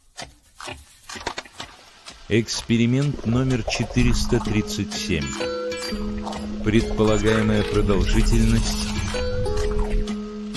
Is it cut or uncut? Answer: cut